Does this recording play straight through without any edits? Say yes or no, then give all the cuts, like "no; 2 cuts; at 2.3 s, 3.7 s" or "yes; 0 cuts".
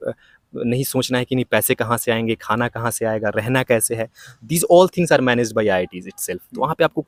yes; 0 cuts